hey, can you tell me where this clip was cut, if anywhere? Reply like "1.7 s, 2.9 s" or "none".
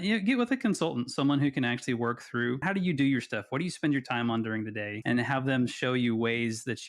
2.6 s, 4.9 s